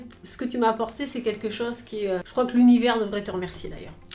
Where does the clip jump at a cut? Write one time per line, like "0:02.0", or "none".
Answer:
0:02.3